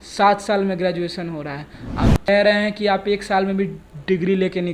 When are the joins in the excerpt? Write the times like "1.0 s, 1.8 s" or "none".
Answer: 2.3 s